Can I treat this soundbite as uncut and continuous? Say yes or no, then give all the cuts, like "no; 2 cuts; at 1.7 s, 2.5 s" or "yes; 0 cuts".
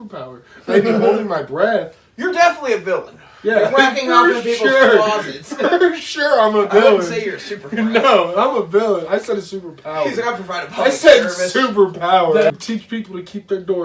no; 1 cut; at 12.5 s